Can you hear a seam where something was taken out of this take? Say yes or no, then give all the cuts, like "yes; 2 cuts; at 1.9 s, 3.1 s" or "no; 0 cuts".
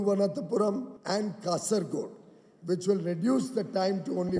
yes; 1 cut; at 0.9 s